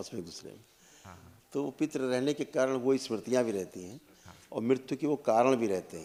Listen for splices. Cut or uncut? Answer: uncut